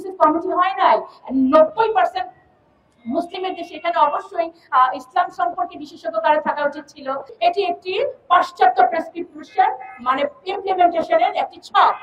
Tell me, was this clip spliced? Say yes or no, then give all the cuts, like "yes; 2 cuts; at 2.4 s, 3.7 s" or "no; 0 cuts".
yes; 1 cut; at 7.3 s